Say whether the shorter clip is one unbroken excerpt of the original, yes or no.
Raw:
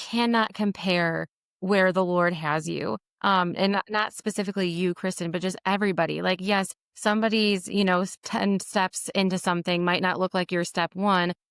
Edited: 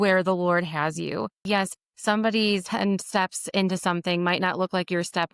no